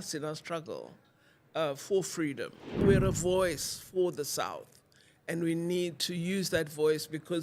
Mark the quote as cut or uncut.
cut